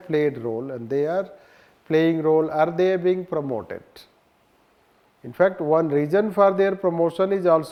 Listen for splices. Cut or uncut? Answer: uncut